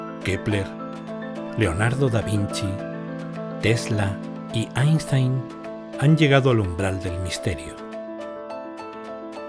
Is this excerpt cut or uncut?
cut